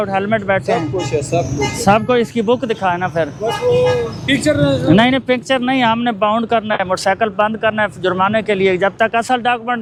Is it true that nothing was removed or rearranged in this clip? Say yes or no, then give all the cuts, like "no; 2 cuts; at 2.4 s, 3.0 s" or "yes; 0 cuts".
yes; 0 cuts